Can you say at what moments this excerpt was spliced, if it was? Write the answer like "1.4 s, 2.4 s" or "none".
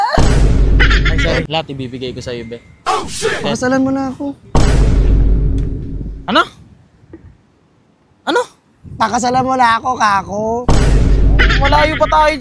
1.5 s